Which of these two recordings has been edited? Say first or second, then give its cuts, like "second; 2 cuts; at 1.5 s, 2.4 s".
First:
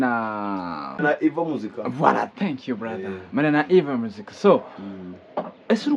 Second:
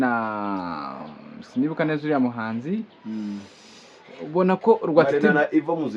first; 1 cut; at 1.0 s